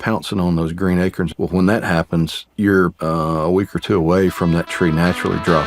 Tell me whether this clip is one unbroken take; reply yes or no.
no